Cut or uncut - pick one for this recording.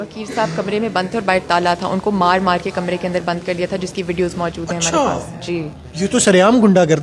uncut